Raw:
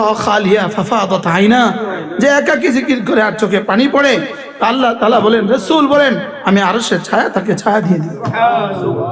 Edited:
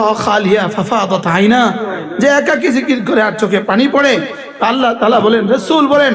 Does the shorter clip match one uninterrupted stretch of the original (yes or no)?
yes